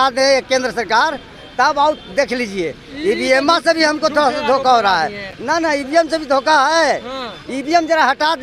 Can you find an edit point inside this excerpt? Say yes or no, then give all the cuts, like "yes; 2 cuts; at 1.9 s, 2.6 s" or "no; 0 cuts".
no; 0 cuts